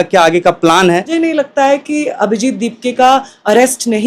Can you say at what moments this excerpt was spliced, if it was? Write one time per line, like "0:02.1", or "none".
0:01.1